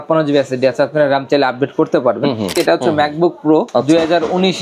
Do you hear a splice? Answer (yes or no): yes